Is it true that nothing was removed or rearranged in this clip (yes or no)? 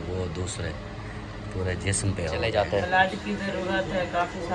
no